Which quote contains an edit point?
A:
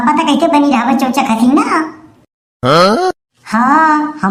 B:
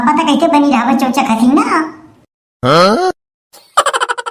B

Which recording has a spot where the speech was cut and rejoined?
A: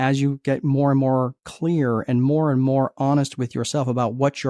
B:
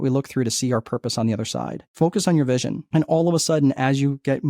B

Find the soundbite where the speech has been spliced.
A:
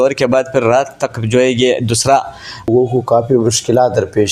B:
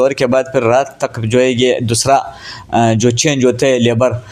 A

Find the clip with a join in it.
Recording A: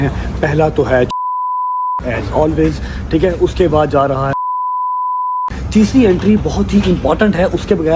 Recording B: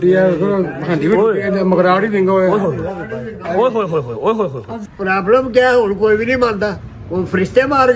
B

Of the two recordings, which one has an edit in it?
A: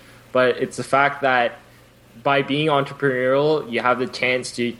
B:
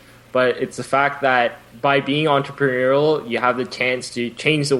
B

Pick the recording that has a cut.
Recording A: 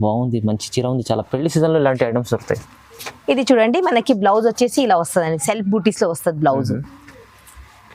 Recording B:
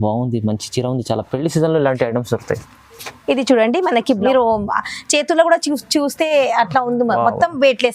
B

